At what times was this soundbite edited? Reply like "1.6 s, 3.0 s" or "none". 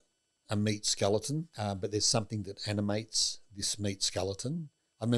1.5 s